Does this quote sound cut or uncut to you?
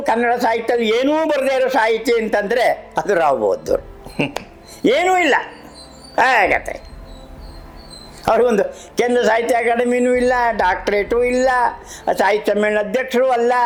uncut